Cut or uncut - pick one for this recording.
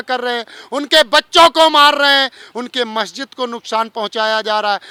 uncut